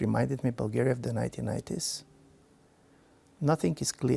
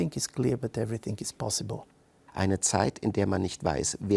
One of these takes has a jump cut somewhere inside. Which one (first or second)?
second